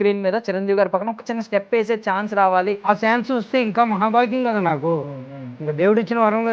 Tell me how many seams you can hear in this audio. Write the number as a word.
one